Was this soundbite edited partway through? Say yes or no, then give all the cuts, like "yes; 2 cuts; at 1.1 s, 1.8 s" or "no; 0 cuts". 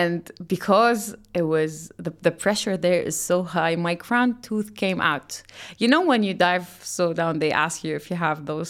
no; 0 cuts